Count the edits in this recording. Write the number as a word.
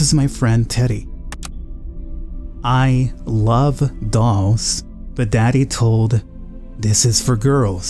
one